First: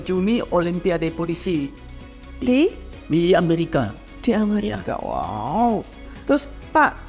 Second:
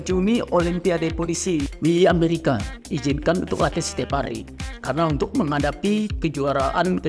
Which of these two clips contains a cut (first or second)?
second